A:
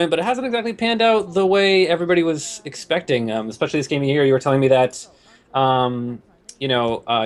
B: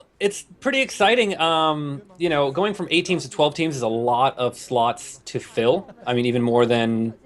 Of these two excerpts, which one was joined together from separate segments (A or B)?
B